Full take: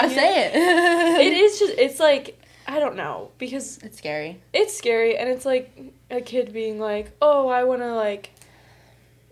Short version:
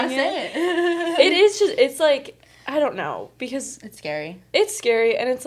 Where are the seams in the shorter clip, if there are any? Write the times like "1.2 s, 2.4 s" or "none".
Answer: none